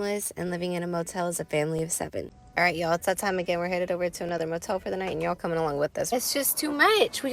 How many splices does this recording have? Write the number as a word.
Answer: two